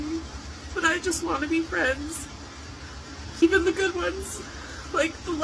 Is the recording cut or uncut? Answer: cut